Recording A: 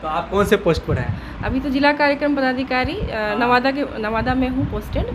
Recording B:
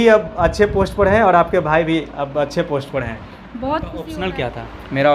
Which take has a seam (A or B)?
B